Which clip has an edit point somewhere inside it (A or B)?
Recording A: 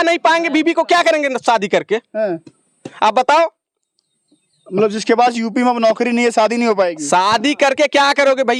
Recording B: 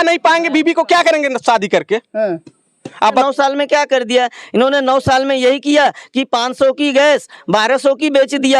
B